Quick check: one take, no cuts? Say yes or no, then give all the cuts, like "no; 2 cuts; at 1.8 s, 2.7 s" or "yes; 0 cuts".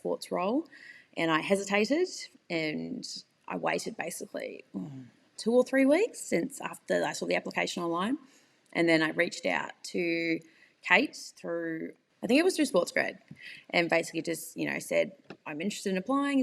no; 1 cut; at 12.0 s